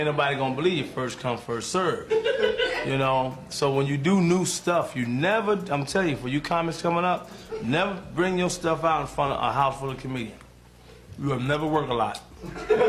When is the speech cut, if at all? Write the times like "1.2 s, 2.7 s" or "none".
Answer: none